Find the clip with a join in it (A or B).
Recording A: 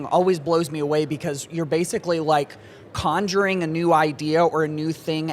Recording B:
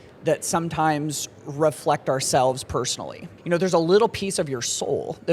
B